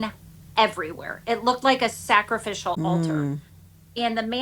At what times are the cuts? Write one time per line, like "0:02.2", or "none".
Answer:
0:02.8